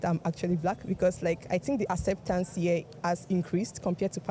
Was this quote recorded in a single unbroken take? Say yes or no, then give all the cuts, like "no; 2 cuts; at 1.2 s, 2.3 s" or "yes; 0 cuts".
yes; 0 cuts